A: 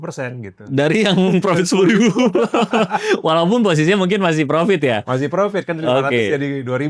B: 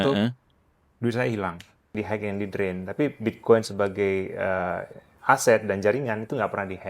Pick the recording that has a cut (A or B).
B